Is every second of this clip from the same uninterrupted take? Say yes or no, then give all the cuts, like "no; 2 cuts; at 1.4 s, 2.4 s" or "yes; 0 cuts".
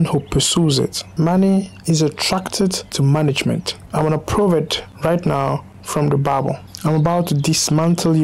yes; 0 cuts